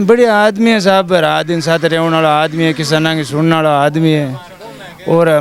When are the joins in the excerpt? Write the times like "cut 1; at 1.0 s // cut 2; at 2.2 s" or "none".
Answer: none